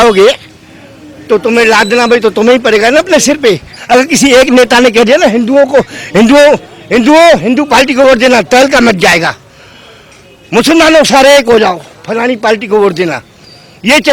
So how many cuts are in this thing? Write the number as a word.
one